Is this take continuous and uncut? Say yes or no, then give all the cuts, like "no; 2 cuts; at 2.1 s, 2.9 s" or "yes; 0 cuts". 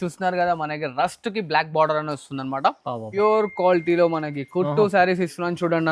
no; 1 cut; at 3.0 s